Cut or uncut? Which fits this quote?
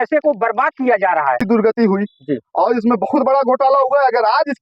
cut